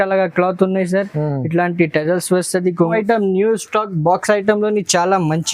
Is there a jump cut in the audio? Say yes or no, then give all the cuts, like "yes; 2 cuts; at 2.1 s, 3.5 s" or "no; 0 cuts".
yes; 1 cut; at 2.9 s